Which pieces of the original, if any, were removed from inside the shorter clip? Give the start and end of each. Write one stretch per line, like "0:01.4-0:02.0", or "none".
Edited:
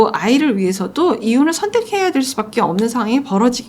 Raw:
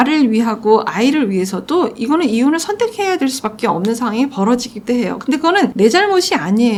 0:02.0-0:02.3